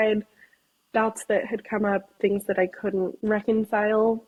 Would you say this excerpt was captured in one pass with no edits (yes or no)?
yes